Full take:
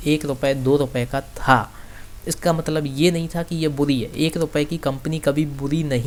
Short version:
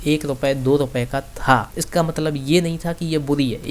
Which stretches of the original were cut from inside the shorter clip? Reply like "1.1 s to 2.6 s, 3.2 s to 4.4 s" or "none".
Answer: 1.8 s to 2.3 s